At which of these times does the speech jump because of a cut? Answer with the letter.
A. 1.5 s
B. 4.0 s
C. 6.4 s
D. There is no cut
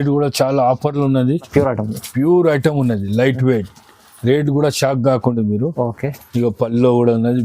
A